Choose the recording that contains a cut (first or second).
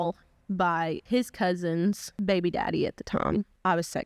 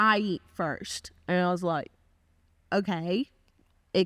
first